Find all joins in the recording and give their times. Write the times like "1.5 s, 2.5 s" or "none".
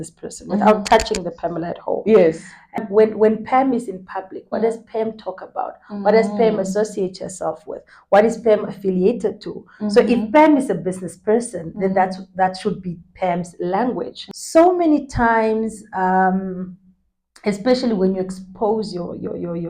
2.8 s, 14.2 s

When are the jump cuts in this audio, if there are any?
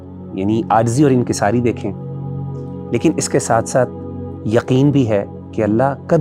none

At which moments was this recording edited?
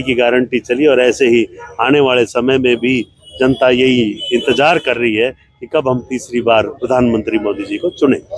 none

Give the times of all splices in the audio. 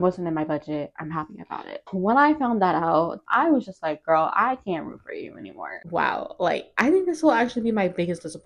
1.7 s, 3.1 s, 5.7 s

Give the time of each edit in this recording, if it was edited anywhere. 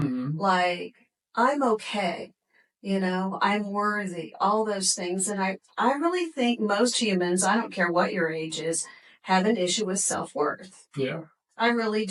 none

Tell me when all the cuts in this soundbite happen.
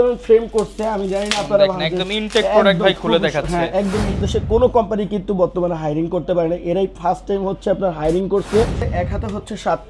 4.2 s, 8.8 s

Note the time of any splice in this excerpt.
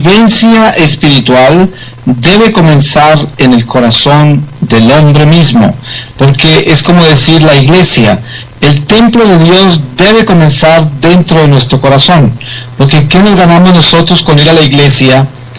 7.2 s

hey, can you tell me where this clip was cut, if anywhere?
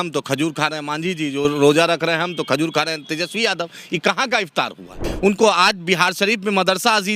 5.0 s

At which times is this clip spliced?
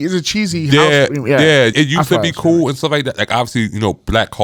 1.7 s

